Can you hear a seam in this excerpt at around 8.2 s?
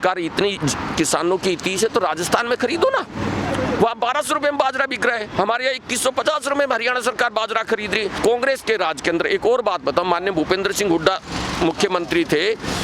yes; 1 cut; at 8.2 s

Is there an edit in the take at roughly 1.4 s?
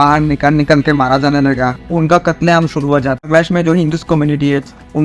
no; 1 cut; at 3.3 s

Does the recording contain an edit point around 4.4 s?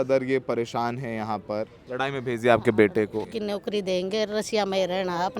no; 2 cuts; at 1.8 s, 3.2 s

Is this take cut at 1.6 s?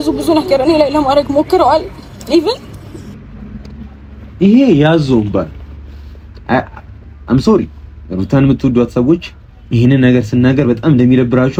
no; 0 cuts

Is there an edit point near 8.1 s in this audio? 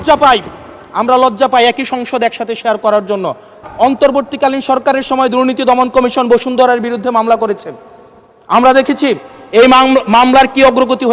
no; 1 cut; at 3.6 s

